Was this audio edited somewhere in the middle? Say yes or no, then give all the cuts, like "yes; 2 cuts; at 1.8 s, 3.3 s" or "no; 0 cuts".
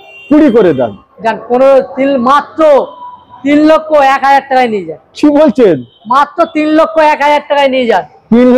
no; 0 cuts